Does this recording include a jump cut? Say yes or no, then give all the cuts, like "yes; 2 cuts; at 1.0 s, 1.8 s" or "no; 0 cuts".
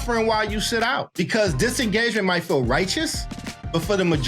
no; 0 cuts